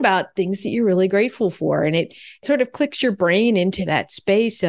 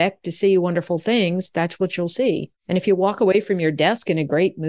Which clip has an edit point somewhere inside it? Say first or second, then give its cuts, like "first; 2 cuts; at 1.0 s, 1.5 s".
first; 1 cut; at 2.4 s